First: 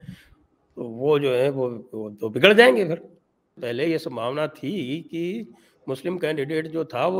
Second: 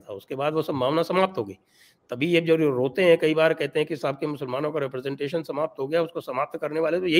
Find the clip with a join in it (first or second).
first